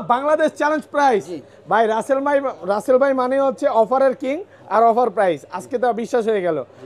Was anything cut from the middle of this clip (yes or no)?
no